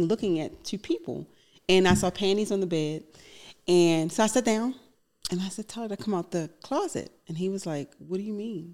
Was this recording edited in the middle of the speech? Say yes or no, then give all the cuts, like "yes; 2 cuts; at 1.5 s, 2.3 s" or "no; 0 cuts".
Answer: no; 0 cuts